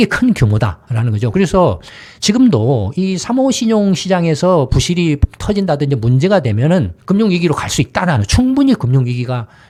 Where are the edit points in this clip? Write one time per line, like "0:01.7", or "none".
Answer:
none